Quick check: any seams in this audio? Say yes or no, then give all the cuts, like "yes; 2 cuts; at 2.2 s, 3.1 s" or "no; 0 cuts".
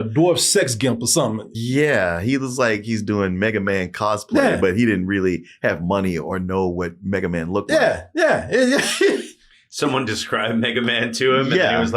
yes; 1 cut; at 1.5 s